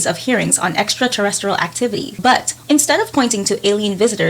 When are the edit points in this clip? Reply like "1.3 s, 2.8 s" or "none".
2.4 s